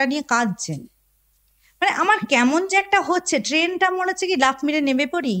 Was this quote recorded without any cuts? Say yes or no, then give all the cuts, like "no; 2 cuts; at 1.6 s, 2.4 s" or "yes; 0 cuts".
yes; 0 cuts